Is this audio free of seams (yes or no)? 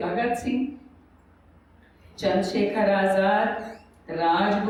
yes